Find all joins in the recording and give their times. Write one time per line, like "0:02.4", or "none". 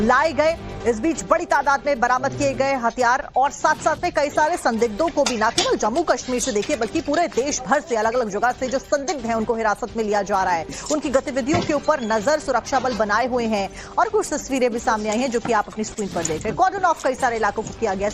0:09.4